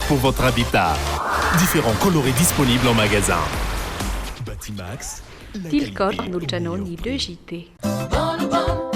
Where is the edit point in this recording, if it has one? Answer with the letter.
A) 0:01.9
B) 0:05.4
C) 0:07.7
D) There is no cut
C